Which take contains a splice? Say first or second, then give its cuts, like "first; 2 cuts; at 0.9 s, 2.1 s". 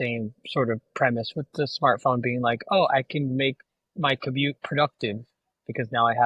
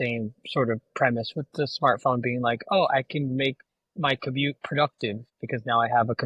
second; 1 cut; at 5.3 s